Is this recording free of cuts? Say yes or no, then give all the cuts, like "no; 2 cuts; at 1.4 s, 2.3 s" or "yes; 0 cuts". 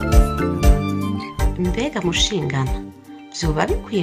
no; 1 cut; at 1.5 s